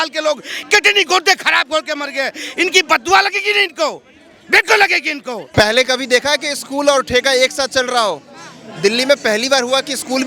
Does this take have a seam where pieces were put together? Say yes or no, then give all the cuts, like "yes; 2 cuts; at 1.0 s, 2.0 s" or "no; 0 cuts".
yes; 1 cut; at 5.4 s